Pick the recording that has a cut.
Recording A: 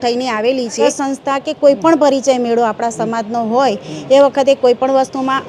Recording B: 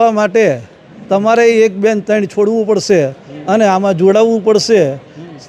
A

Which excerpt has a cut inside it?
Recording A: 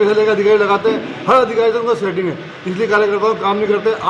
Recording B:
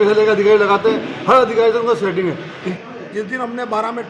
B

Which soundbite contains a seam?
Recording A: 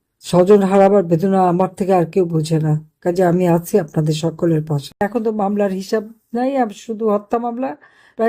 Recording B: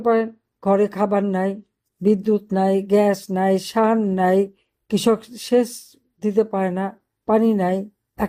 A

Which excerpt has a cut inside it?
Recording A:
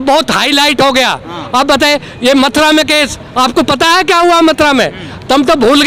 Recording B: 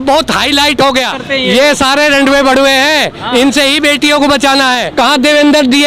B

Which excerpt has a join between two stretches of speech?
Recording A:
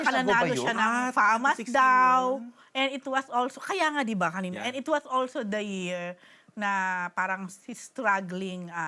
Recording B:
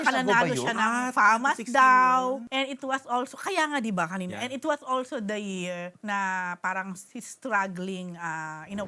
B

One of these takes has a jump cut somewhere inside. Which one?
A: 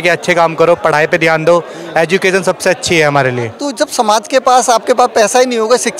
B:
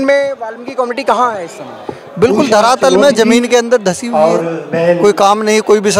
A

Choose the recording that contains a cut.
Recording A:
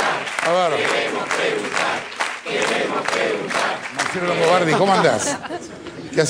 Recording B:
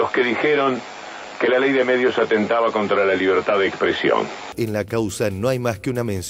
B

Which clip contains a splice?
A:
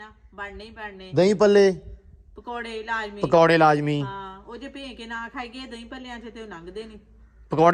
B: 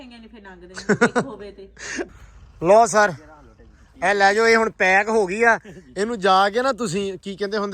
B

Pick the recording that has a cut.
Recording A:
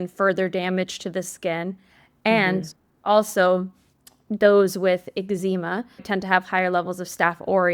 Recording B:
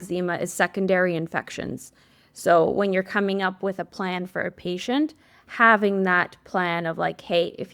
A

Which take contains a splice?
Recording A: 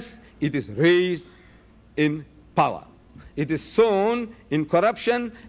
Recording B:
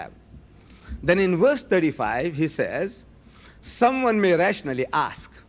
B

